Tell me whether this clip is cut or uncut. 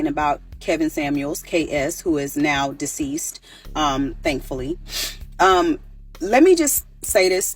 cut